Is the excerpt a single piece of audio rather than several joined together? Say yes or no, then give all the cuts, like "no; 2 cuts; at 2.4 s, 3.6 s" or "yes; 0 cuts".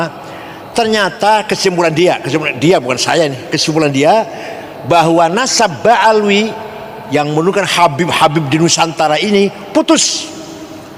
yes; 0 cuts